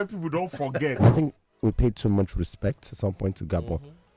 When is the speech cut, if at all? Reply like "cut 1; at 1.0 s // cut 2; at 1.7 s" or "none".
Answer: cut 1; at 1.0 s